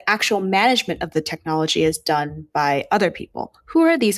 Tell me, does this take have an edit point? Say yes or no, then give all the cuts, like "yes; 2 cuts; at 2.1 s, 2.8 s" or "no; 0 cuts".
no; 0 cuts